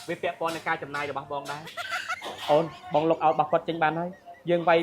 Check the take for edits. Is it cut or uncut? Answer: cut